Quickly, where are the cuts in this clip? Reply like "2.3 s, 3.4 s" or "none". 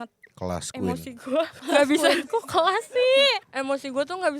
1.6 s, 3.5 s